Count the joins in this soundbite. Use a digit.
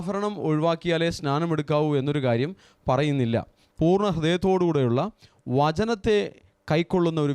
1